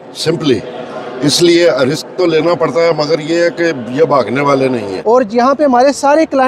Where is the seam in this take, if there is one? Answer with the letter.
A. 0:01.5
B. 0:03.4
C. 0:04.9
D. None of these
C